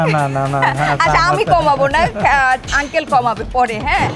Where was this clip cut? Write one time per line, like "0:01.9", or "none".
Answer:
none